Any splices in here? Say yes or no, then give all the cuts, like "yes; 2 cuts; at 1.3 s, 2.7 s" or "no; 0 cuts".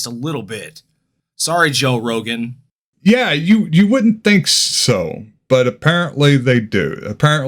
no; 0 cuts